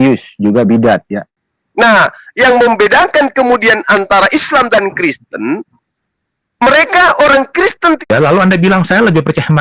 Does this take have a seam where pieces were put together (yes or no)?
yes